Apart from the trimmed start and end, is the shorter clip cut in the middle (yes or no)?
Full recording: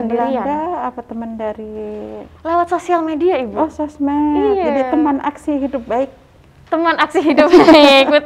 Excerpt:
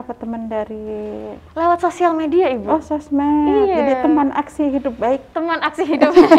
yes